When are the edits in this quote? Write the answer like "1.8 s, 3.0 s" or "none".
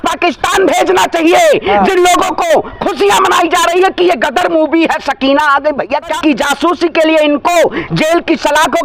6.1 s